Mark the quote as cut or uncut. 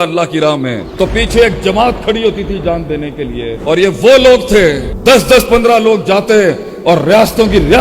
uncut